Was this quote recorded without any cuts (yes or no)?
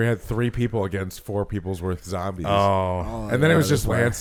yes